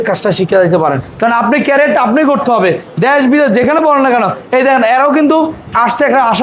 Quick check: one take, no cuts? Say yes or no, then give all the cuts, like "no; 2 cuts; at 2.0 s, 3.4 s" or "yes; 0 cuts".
yes; 0 cuts